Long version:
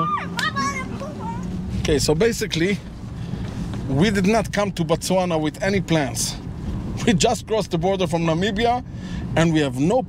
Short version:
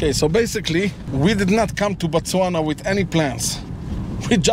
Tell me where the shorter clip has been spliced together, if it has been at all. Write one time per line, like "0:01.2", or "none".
0:01.0

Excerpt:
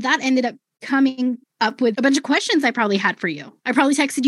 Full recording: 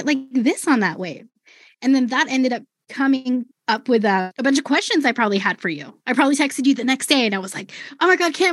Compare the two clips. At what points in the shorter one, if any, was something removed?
0:01.9

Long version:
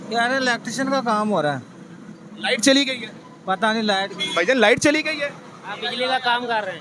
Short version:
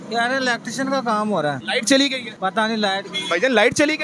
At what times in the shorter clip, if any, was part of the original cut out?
0:01.6
0:02.3

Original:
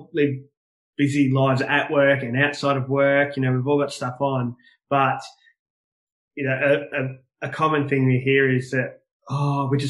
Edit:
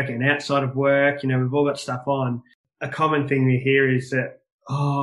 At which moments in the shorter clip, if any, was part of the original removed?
0:02.6

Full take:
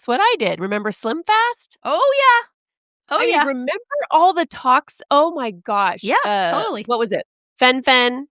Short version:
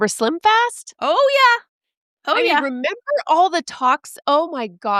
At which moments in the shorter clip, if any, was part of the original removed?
none

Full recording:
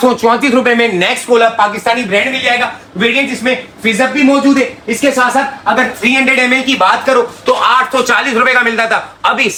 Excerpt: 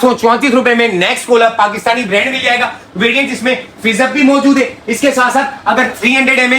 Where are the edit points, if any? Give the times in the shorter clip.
none

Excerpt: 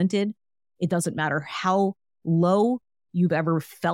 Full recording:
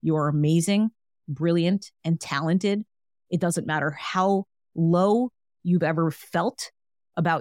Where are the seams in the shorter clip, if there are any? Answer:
none

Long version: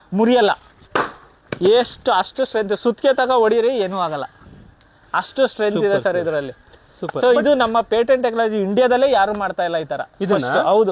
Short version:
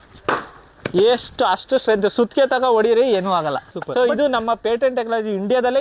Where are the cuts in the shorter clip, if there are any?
0:03.7

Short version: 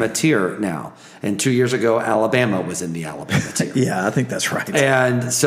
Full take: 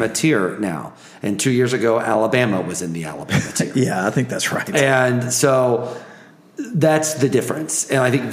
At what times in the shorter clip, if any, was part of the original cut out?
none

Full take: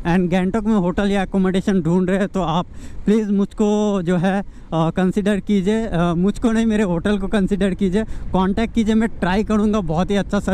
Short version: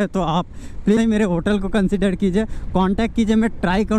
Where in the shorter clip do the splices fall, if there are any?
0:01.0

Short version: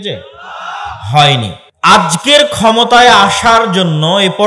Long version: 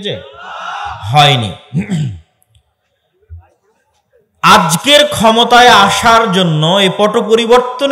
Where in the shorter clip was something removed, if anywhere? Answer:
0:01.6

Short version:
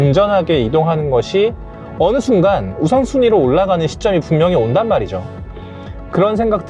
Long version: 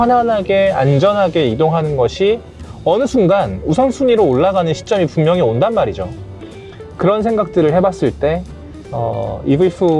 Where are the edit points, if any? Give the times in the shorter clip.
none

